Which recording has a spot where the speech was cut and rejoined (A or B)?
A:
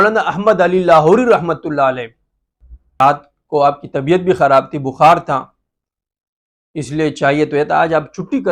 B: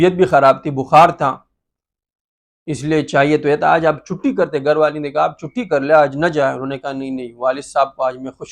A